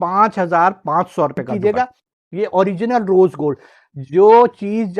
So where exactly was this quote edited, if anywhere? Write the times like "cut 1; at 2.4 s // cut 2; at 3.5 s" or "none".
cut 1; at 1.5 s